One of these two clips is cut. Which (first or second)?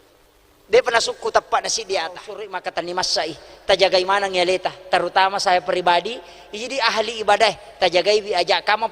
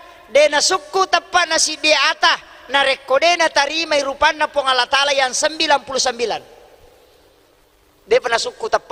first